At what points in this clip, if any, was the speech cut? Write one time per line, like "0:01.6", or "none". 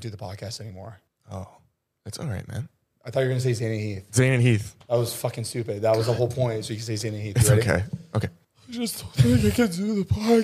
none